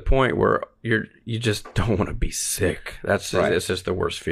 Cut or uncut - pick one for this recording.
uncut